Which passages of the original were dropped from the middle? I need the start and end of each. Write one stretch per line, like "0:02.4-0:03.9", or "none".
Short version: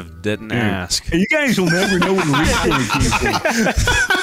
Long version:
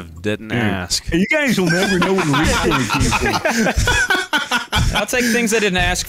none